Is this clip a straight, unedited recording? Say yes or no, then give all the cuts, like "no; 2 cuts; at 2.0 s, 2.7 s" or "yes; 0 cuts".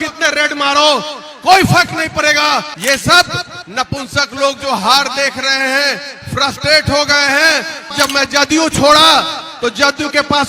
no; 2 cuts; at 2.7 s, 7.9 s